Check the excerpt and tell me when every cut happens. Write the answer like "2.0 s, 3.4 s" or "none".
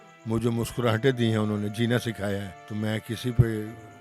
2.6 s